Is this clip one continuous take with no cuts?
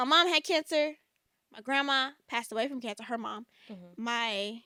yes; 0 cuts

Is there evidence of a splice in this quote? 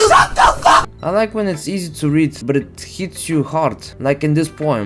yes; 3 cuts; at 0.9 s, 2.4 s, 3.9 s

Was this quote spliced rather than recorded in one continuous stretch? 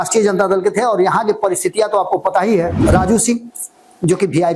yes; 1 cut; at 2.8 s

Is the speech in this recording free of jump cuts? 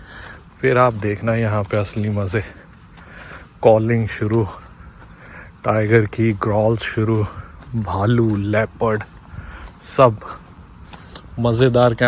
yes; 0 cuts

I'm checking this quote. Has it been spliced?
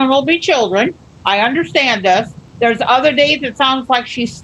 yes; 1 cut; at 2.4 s

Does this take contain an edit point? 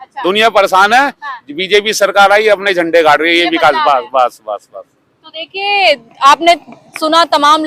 no; 0 cuts

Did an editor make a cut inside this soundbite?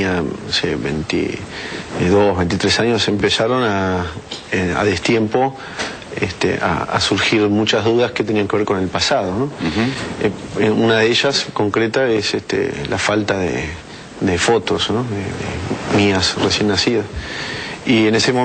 no; 0 cuts

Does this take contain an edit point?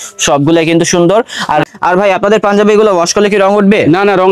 yes; 1 cut; at 1.7 s

